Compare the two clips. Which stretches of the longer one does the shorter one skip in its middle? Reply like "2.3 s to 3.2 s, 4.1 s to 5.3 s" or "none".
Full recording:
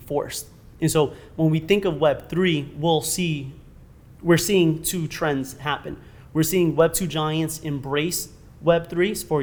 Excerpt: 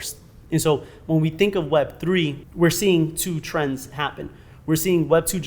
2.7 s to 4.1 s